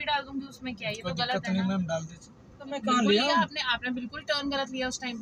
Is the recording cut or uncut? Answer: cut